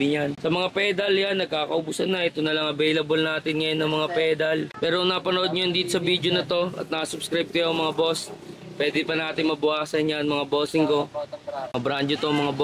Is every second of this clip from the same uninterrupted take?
no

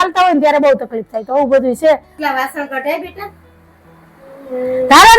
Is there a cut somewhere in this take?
yes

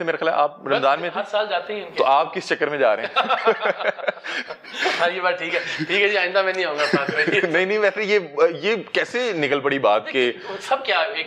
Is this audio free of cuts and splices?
yes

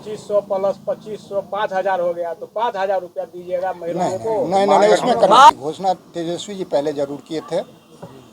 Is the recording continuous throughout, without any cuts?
no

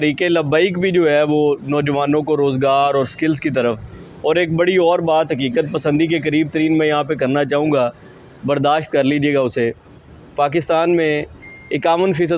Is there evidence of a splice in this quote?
no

